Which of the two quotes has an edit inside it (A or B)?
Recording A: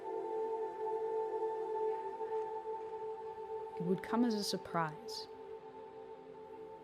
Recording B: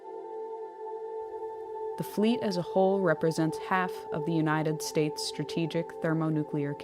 B